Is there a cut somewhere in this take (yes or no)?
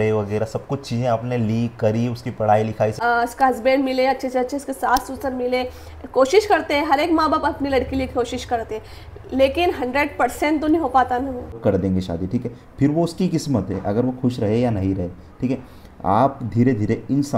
yes